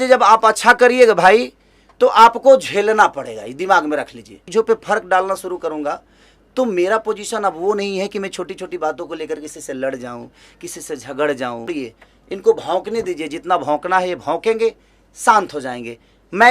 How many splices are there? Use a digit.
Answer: 2